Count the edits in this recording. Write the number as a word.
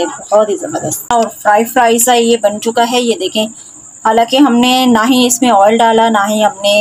one